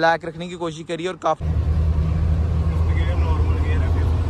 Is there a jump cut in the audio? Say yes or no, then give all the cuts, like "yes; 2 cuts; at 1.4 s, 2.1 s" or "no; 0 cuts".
yes; 1 cut; at 1.4 s